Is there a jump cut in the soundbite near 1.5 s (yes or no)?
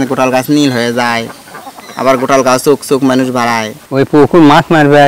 no